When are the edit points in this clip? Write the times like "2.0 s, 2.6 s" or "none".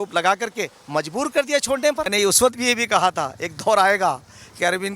2.1 s